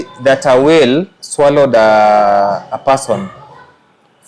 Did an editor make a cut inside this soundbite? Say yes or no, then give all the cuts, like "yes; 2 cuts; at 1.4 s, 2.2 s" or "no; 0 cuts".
no; 0 cuts